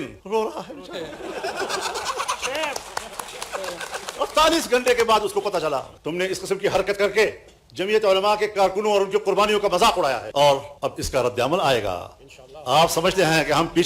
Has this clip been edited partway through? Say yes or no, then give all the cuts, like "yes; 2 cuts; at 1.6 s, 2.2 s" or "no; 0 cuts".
yes; 1 cut; at 6.0 s